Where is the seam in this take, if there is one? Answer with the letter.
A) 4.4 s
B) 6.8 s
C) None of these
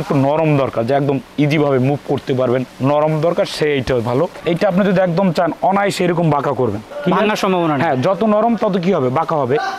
A